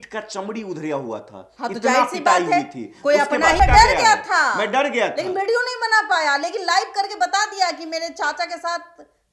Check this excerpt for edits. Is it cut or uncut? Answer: cut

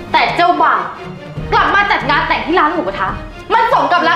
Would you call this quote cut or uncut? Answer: uncut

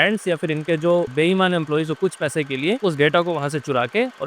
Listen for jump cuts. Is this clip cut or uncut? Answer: cut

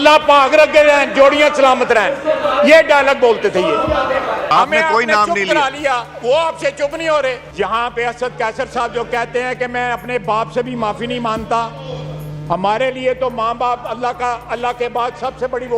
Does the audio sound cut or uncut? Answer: cut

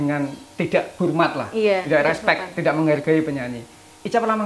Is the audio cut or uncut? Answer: cut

